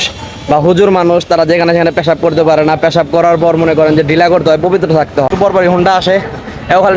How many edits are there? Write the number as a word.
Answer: one